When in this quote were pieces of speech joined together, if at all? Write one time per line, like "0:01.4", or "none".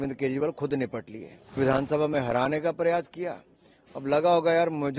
0:01.6